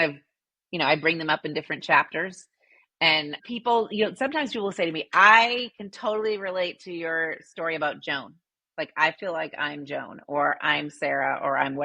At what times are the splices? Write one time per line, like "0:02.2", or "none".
none